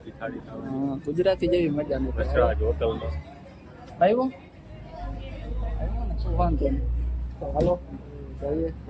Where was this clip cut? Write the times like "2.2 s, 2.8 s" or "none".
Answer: none